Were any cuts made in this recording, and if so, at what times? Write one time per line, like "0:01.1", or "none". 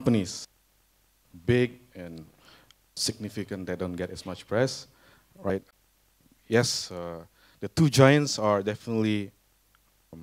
none